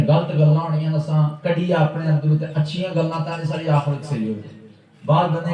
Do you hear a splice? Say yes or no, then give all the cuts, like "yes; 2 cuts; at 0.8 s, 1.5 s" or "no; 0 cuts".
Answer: no; 0 cuts